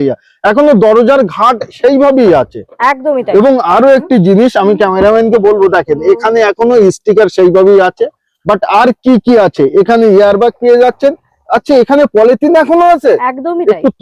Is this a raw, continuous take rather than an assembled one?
yes; 0 cuts

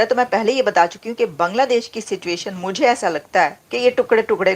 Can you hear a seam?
yes; 1 cut; at 3.6 s

